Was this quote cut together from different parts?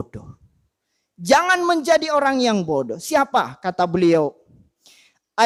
no; 0 cuts

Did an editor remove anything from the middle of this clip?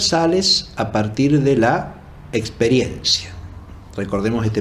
no; 0 cuts

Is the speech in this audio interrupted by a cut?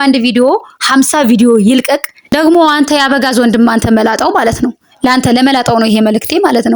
yes; 1 cut; at 2.2 s

